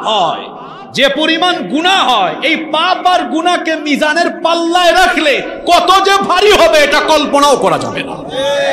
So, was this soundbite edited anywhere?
no; 0 cuts

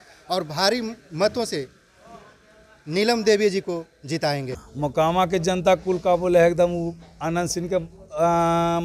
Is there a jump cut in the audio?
yes; 1 cut; at 4.6 s

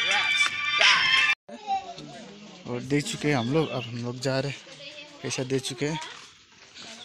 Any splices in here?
yes; 1 cut; at 1.3 s

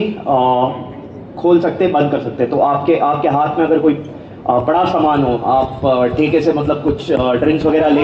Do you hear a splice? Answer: no; 0 cuts

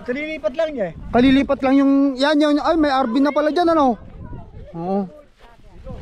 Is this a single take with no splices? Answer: yes; 0 cuts

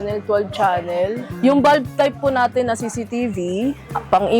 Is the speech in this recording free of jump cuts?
no; 1 cut; at 1.2 s

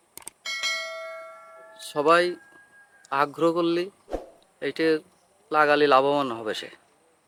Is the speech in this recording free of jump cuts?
yes; 0 cuts

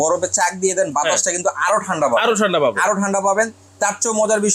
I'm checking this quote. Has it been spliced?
no; 0 cuts

